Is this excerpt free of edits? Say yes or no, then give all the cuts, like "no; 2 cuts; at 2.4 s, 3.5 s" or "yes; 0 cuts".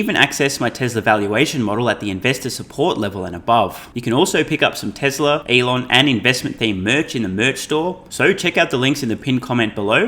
no; 3 cuts; at 3.9 s, 5.4 s, 8.0 s